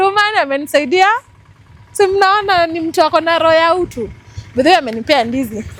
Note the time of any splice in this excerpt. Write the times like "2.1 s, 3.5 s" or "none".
none